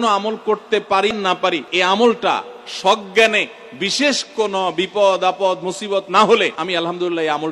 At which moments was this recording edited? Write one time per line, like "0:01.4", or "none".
0:01.3
0:06.6